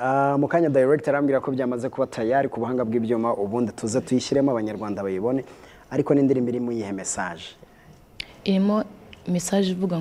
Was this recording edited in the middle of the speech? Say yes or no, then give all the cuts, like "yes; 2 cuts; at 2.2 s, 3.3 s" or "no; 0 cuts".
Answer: no; 0 cuts